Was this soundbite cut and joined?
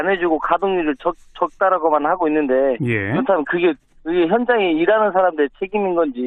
yes; 1 cut; at 2.6 s

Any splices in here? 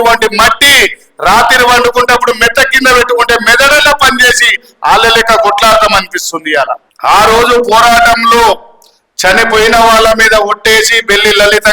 yes; 1 cut; at 6.9 s

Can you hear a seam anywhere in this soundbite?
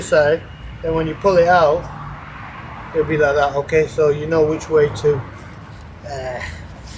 no; 0 cuts

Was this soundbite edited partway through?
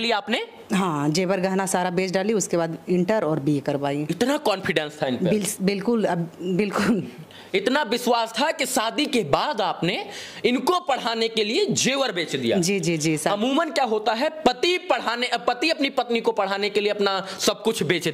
no; 0 cuts

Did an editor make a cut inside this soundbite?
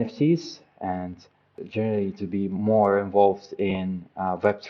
yes; 1 cut; at 1.5 s

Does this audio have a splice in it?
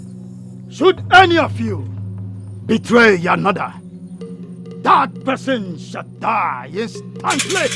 no; 0 cuts

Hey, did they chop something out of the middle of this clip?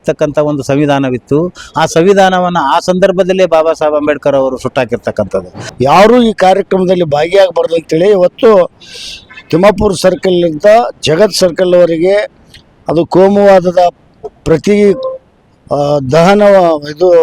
yes; 1 cut; at 5.6 s

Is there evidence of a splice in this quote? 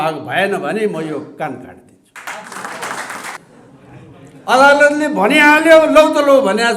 yes; 1 cut; at 3.4 s

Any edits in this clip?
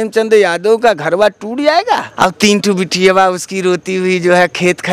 yes; 1 cut; at 2.1 s

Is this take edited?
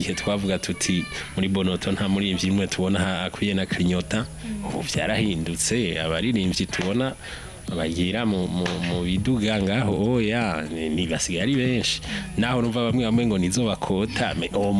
no; 0 cuts

